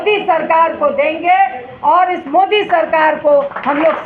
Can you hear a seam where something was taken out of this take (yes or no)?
no